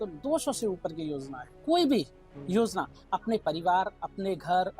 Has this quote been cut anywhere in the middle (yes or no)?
yes